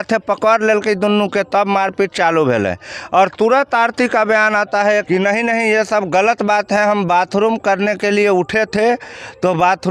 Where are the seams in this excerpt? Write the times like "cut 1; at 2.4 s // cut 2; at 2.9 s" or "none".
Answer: cut 1; at 5.1 s